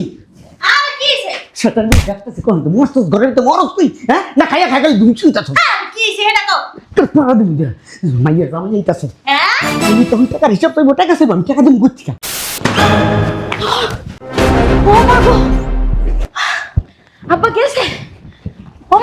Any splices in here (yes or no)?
yes